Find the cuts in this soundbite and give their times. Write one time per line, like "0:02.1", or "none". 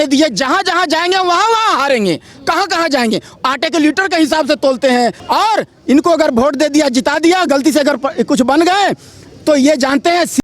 0:05.2